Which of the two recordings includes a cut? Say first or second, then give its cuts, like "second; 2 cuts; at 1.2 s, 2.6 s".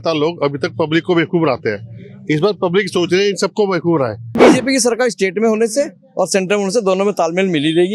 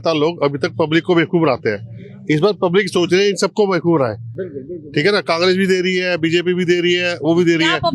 first; 1 cut; at 4.4 s